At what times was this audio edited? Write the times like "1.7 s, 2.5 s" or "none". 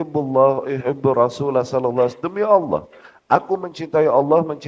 none